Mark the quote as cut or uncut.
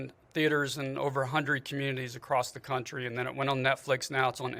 uncut